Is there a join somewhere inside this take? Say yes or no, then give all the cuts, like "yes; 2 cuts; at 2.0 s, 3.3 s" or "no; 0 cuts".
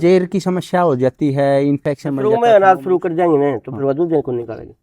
yes; 1 cut; at 2.2 s